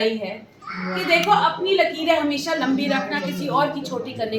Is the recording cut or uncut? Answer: uncut